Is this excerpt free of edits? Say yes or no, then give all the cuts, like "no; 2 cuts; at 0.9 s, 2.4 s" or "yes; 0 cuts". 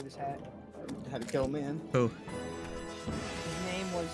yes; 0 cuts